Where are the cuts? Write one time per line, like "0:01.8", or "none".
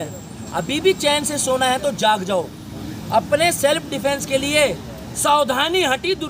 none